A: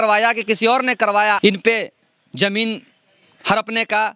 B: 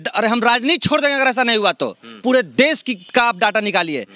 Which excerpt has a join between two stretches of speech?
A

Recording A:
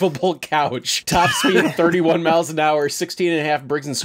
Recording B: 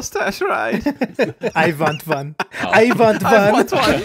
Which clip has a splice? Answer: A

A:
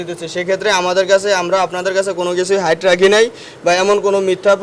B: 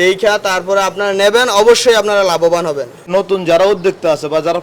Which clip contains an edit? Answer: B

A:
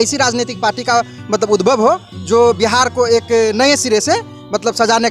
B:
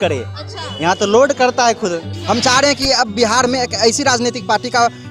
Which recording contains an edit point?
B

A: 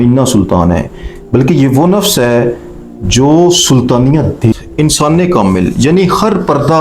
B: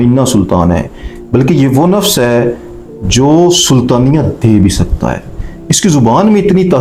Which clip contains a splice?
A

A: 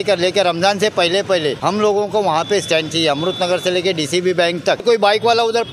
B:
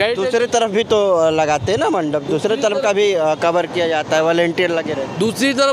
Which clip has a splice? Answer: A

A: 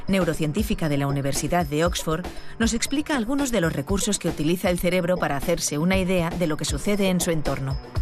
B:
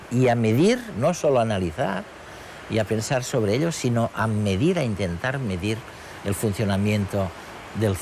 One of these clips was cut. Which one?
A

